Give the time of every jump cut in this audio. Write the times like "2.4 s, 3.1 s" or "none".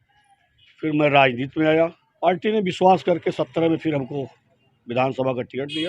2.1 s